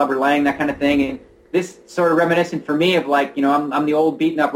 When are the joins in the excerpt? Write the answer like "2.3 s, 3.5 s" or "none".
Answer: none